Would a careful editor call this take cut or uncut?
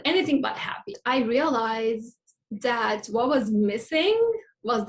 cut